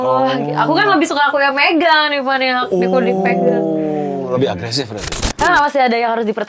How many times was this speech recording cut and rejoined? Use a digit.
1